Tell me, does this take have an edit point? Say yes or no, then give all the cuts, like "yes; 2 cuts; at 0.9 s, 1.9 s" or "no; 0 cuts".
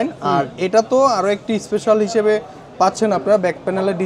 no; 0 cuts